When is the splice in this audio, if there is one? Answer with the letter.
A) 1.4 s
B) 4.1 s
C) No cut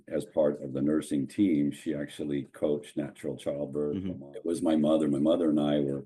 B